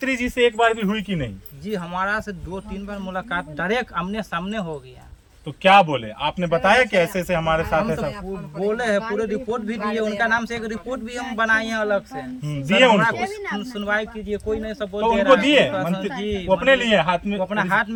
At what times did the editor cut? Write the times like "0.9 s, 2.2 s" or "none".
none